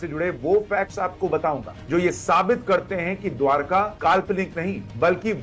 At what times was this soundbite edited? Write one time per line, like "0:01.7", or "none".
none